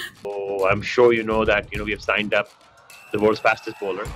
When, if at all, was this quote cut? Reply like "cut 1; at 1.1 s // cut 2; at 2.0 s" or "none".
none